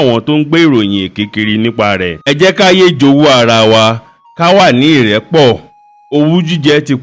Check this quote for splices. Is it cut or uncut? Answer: cut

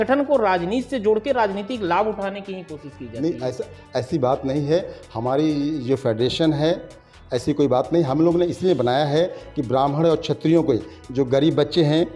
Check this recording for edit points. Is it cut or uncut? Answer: uncut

